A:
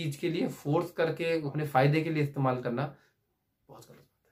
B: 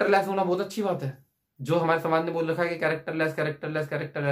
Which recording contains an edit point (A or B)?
A